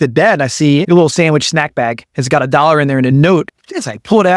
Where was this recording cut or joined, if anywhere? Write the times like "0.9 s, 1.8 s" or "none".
0.8 s, 2.1 s, 3.1 s